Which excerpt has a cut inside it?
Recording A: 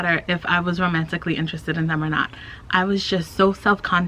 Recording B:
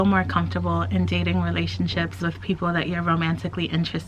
B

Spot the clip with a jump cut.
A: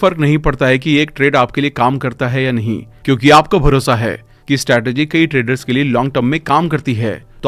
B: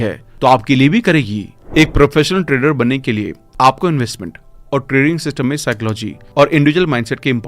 B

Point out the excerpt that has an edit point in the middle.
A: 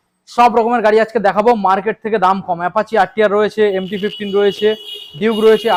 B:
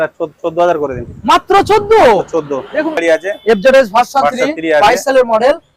B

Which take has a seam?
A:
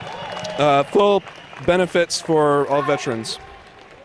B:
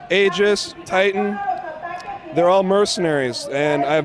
B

